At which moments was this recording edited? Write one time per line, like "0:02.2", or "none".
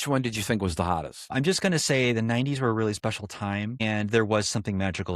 0:01.3
0:03.8